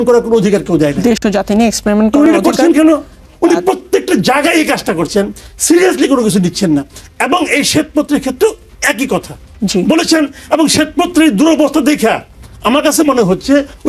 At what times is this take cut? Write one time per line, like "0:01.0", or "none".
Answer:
none